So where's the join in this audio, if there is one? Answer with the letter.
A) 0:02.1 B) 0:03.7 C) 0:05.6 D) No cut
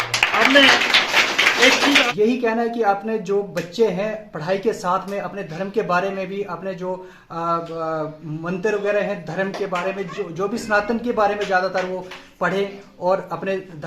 A